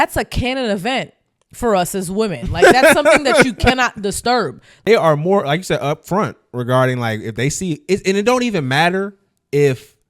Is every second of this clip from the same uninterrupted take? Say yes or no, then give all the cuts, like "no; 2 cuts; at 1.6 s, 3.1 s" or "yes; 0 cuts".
no; 1 cut; at 4.7 s